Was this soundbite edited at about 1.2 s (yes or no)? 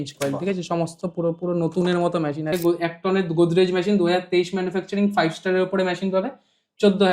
no